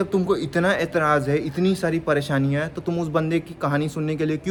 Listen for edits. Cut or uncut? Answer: uncut